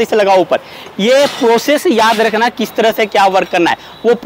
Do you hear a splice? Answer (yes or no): no